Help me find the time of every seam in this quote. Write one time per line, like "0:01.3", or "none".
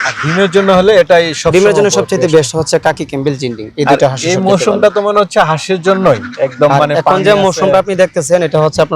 none